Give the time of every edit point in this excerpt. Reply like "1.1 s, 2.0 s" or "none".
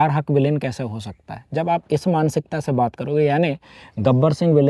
none